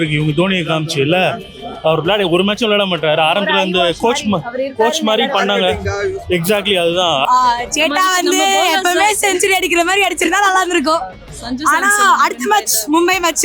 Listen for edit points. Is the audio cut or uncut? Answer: cut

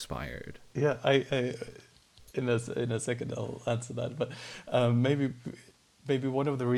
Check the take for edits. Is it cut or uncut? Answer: uncut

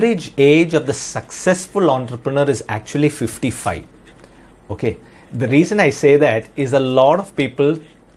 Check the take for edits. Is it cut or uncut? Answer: uncut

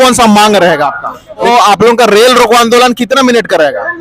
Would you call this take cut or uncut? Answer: cut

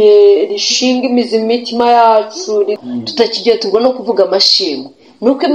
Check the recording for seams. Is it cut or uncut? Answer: cut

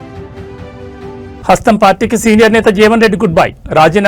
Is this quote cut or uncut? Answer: cut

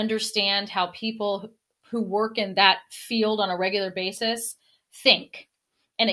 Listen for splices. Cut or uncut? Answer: uncut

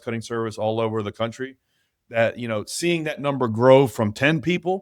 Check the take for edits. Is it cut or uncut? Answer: uncut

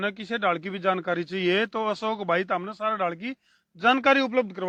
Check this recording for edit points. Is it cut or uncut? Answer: uncut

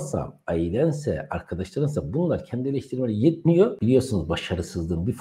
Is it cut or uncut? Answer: cut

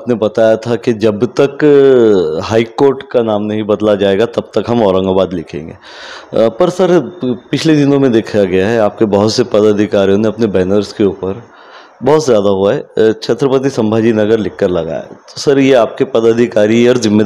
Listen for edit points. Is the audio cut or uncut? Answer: uncut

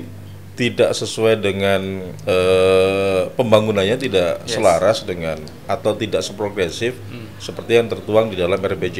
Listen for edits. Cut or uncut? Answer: uncut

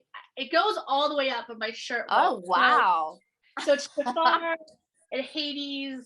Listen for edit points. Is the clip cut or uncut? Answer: cut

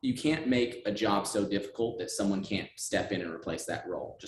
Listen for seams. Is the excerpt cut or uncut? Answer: uncut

